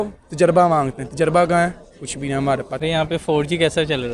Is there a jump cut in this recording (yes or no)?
yes